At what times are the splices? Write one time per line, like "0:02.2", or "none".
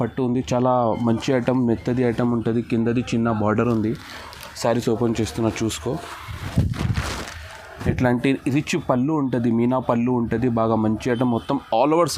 none